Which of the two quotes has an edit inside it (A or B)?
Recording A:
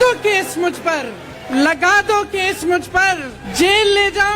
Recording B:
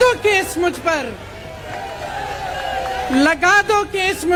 A